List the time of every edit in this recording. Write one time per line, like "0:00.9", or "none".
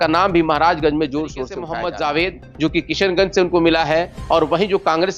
0:01.6